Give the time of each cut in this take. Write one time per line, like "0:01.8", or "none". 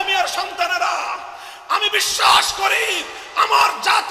none